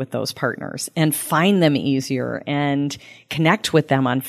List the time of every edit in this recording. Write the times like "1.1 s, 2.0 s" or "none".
none